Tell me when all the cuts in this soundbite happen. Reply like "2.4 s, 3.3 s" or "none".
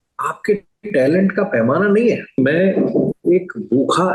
2.4 s